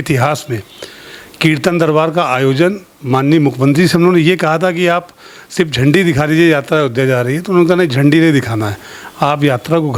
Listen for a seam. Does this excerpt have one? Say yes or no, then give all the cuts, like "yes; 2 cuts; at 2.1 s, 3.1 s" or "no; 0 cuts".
no; 0 cuts